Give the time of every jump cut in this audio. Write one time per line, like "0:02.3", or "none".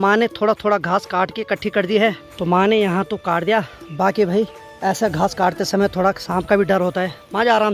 none

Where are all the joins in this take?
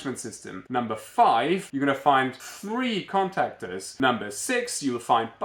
0:01.7
0:02.4
0:03.8

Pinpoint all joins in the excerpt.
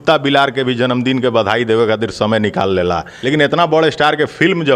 0:03.1

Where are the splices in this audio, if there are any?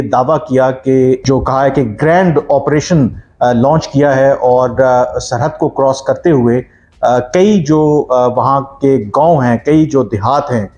0:01.2

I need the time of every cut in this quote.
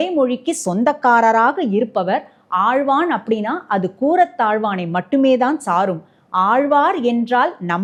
none

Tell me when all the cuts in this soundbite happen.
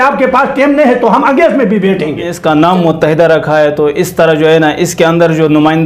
0:02.3

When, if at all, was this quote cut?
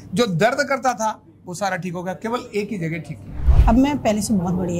0:03.4

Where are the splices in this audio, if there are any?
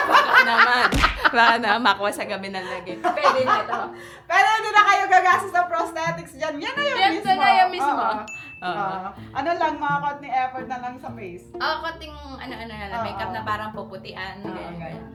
none

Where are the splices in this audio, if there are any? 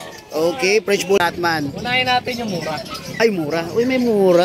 0:01.2

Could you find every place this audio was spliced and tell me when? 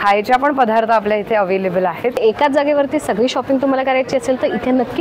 0:02.2

